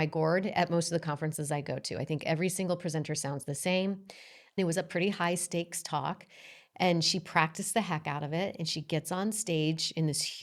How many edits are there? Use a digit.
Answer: 1